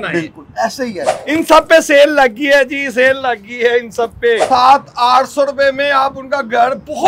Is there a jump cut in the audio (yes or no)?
yes